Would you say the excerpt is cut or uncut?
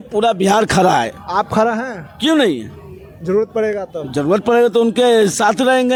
uncut